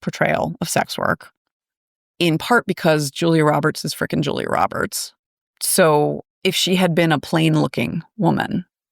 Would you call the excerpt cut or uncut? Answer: uncut